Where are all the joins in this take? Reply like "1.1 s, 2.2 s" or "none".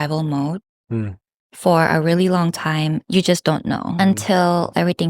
3.0 s, 4.0 s